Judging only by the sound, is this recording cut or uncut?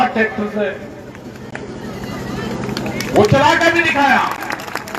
uncut